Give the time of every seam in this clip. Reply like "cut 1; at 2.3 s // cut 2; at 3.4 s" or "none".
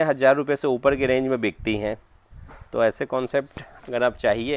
none